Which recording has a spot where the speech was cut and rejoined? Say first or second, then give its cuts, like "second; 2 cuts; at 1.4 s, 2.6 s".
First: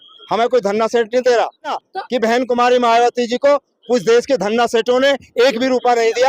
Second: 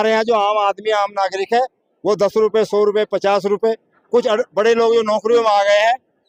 first; 1 cut; at 1.8 s